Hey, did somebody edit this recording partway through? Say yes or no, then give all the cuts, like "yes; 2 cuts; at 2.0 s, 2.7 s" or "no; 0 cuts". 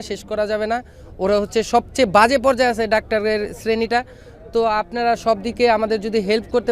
no; 0 cuts